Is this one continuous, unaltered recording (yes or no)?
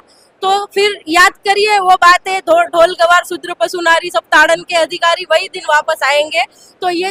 yes